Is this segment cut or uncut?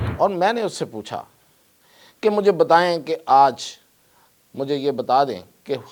uncut